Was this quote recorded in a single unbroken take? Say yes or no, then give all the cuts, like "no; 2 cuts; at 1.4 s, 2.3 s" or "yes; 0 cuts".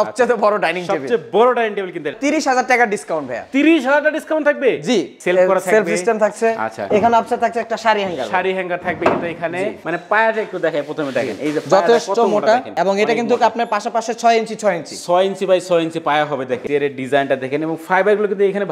no; 4 cuts; at 2.2 s, 5.2 s, 9.8 s, 16.6 s